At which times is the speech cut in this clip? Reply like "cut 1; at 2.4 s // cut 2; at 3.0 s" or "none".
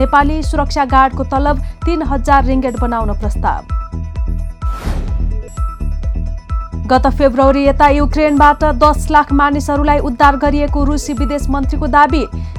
none